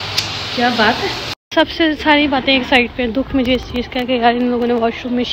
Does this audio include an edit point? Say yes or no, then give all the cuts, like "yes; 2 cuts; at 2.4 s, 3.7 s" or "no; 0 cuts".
no; 0 cuts